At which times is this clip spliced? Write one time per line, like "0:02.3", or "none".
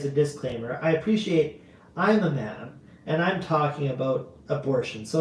none